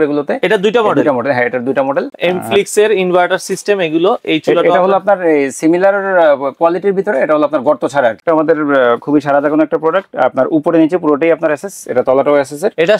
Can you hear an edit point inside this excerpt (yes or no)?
yes